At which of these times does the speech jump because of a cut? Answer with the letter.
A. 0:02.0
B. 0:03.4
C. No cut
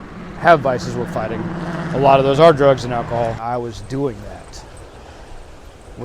B